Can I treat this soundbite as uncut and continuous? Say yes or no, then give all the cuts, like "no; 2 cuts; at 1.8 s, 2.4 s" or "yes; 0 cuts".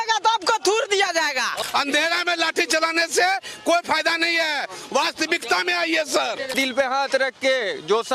no; 2 cuts; at 1.6 s, 6.6 s